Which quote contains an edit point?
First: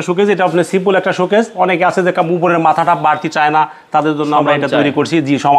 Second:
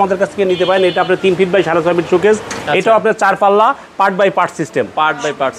second; 1 cut; at 2.5 s

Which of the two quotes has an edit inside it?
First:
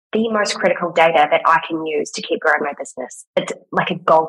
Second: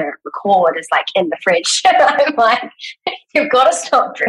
first; 1 cut; at 3.3 s

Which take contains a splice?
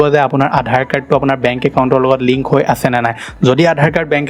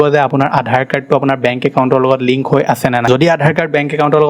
second; 1 cut; at 3.1 s

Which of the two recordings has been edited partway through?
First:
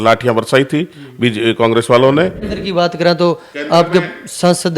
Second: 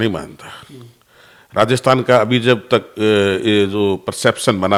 first; 1 cut; at 2.5 s

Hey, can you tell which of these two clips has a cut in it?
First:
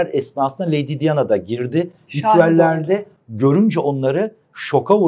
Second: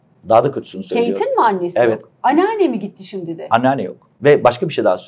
second; 1 cut; at 4.0 s

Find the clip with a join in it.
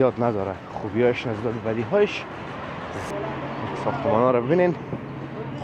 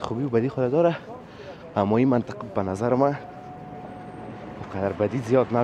first; 1 cut; at 3.1 s

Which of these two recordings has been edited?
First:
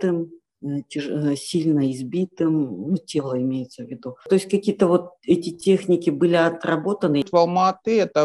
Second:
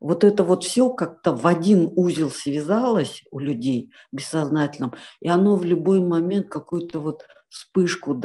first; 2 cuts; at 4.3 s, 7.3 s

